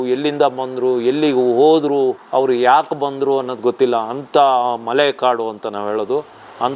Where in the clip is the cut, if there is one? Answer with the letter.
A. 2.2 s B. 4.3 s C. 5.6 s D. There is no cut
A